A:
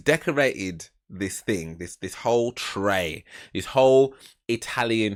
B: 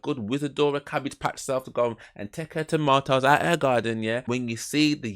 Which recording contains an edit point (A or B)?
B